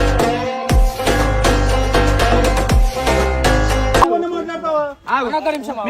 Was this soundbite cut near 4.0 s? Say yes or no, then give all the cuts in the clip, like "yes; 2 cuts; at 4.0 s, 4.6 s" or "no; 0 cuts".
yes; 1 cut; at 4.0 s